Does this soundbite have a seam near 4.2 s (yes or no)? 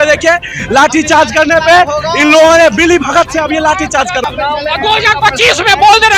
yes